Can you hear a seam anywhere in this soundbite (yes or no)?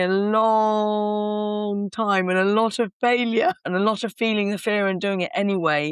yes